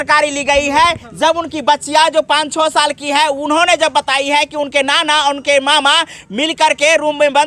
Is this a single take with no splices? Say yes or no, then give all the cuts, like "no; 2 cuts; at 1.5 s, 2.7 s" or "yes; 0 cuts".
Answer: yes; 0 cuts